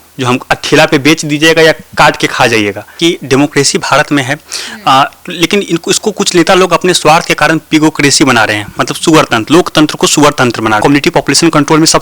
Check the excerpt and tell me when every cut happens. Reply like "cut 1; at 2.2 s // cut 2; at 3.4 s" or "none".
cut 1; at 2.9 s // cut 2; at 10.8 s